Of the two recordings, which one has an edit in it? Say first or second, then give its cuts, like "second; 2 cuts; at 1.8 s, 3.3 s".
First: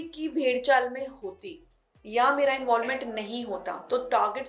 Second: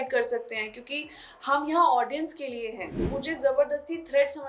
second; 1 cut; at 3.0 s